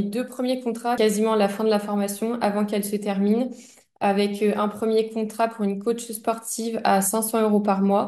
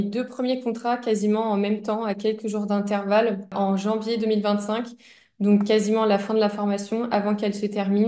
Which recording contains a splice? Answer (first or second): first